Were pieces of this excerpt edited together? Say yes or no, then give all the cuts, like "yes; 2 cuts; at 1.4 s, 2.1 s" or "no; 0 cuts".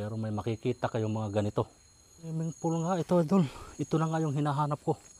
yes; 1 cut; at 2.3 s